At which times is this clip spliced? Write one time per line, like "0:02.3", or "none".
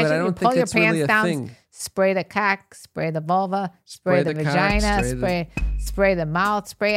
none